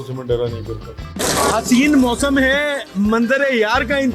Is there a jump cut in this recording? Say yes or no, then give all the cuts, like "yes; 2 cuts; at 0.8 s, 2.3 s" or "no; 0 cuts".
yes; 1 cut; at 1.2 s